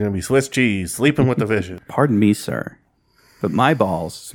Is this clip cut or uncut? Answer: cut